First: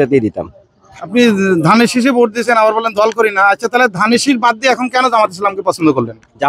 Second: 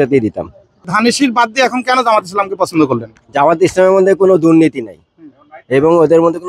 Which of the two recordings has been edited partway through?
second; 1 cut; at 0.9 s

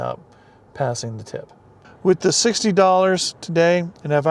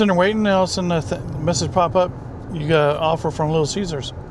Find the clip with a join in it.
first; 1 cut; at 1.8 s

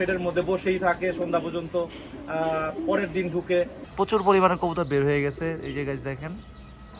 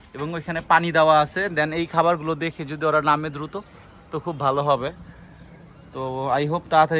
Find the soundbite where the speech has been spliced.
first; 1 cut; at 3.9 s

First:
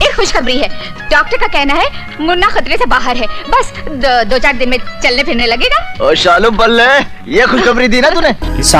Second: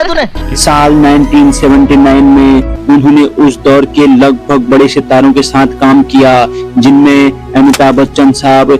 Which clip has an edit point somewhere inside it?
second; 1 cut; at 2.7 s

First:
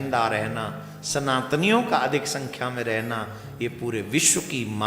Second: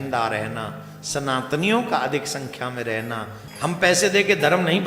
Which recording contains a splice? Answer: second; 1 cut; at 3.4 s

